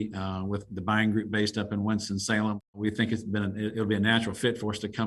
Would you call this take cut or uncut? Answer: cut